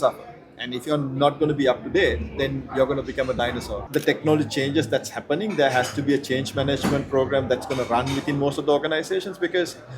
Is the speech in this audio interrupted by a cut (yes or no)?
yes